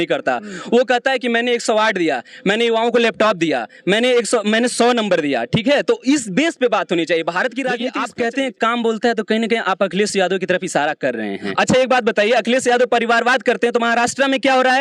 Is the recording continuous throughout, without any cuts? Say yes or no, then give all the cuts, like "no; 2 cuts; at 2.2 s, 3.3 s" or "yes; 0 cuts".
no; 2 cuts; at 7.9 s, 11.5 s